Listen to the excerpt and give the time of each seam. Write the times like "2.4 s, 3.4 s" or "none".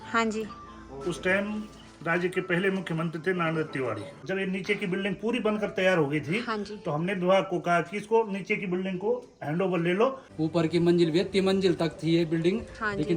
4.2 s, 10.2 s